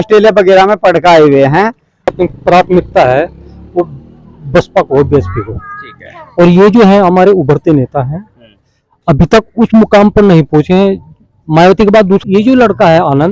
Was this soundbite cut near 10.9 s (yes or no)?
no